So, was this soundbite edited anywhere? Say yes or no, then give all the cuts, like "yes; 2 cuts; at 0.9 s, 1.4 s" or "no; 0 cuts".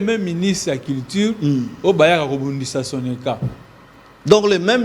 no; 0 cuts